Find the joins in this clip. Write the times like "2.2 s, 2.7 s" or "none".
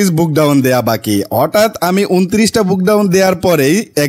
none